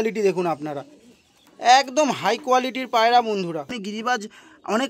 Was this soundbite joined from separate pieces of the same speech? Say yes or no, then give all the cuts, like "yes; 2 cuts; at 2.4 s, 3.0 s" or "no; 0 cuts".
yes; 1 cut; at 3.8 s